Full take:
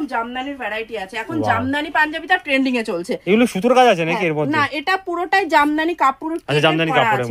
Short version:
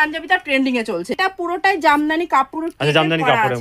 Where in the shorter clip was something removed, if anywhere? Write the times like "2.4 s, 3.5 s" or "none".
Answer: 1.1 s